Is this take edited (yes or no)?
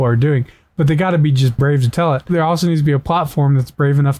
yes